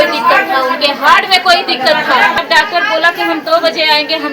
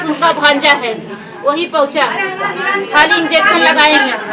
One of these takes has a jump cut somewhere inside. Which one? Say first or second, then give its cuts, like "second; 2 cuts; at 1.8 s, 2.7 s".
first; 1 cut; at 2.4 s